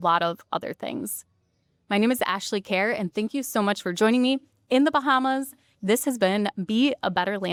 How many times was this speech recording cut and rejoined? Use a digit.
0